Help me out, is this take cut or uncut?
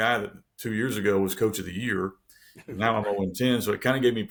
uncut